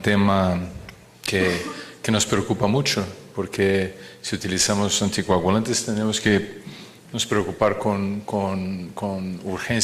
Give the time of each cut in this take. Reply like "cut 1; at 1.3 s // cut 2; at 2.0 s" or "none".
cut 1; at 5.8 s